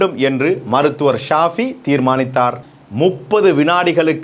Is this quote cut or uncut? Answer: cut